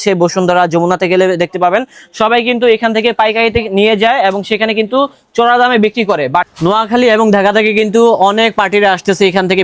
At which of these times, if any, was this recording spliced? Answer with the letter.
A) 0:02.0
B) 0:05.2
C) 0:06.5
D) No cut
C